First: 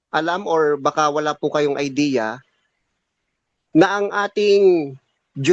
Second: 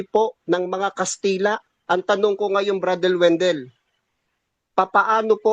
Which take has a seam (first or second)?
second